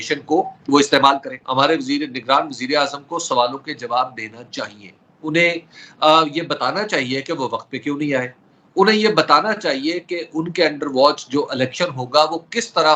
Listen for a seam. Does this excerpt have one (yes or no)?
yes